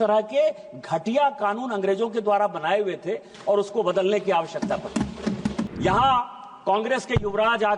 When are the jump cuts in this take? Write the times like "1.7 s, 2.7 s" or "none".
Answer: 5.7 s